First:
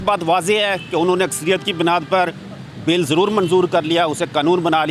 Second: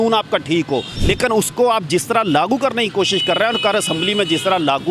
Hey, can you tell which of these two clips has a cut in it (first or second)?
second